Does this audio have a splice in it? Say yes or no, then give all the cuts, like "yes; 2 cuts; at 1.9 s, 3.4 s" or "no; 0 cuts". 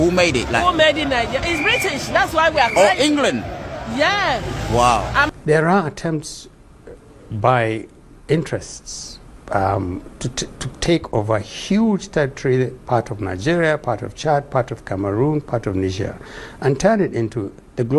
yes; 1 cut; at 5.3 s